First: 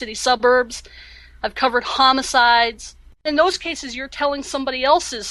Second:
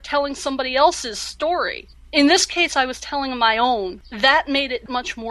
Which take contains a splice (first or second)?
second